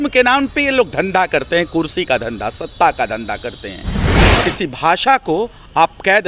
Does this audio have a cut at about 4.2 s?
yes; 1 cut; at 4.2 s

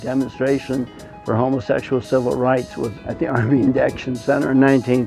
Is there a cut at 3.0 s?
yes; 1 cut; at 3.0 s

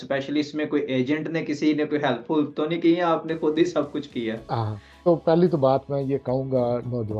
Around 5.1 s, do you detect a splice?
yes; 1 cut; at 5.1 s

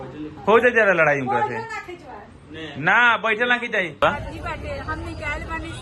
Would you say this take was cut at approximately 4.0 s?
yes; 1 cut; at 4.0 s

